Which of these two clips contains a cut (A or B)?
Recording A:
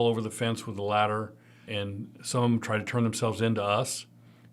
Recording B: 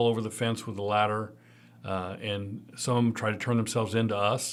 A